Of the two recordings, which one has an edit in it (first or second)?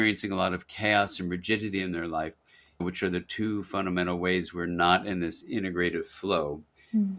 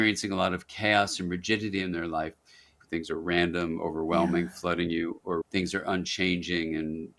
second